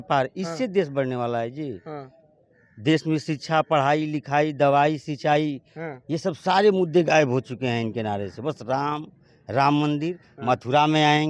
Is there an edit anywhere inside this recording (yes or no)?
no